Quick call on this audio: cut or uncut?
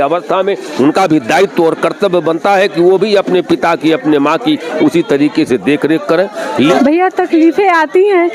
cut